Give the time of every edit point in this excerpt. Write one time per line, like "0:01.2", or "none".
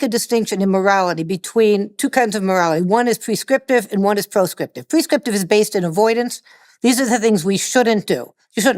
none